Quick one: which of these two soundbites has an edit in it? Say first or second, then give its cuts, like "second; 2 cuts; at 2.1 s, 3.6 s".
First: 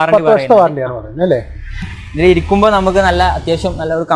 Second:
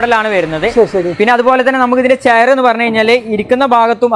first; 1 cut; at 2.0 s